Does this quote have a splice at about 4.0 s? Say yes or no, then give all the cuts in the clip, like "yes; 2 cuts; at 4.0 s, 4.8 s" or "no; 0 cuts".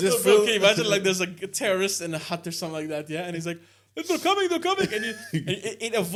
no; 0 cuts